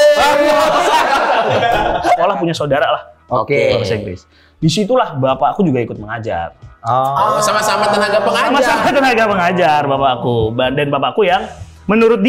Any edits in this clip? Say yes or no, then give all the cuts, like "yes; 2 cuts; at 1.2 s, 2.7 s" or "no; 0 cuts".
yes; 1 cut; at 2.2 s